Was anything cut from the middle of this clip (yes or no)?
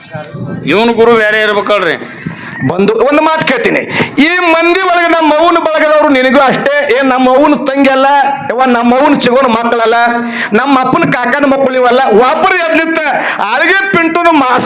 no